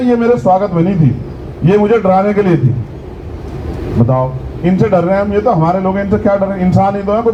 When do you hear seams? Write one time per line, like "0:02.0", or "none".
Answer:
none

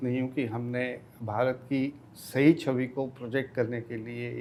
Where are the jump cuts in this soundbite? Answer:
none

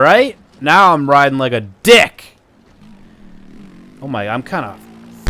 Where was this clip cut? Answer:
0:02.8

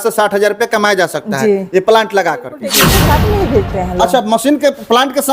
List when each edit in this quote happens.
0:02.8

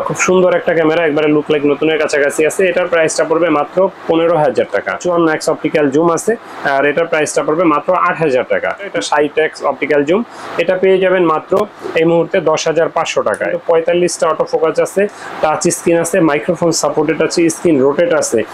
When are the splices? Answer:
0:05.0
0:08.8
0:13.6

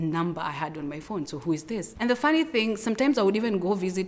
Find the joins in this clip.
0:01.9

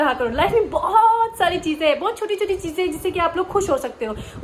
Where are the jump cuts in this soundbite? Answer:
none

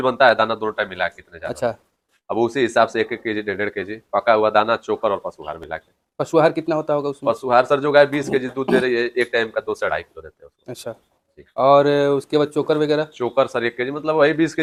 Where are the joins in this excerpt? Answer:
none

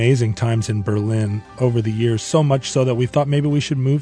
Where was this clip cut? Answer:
0:01.4
0:03.1

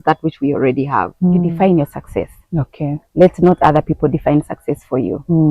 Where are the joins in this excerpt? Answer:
0:01.5

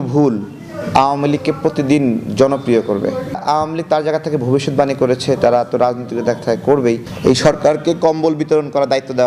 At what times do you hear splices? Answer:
0:03.4
0:07.1

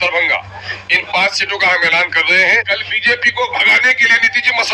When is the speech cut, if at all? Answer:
0:02.6

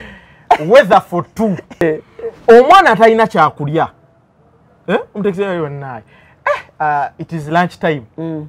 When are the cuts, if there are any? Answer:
0:01.8

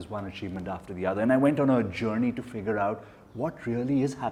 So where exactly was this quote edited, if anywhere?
none

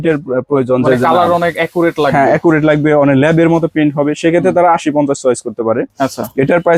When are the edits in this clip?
none

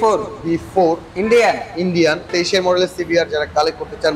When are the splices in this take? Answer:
0:02.3

